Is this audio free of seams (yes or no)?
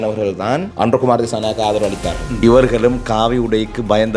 no